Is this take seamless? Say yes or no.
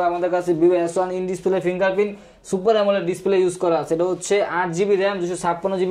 yes